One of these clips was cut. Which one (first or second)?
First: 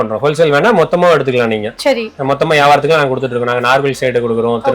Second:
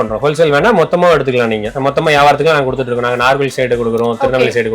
second